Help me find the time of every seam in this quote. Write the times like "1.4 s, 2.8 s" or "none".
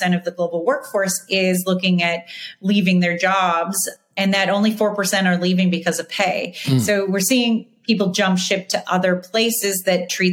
3.9 s